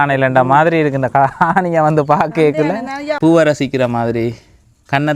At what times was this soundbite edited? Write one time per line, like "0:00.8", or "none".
0:03.2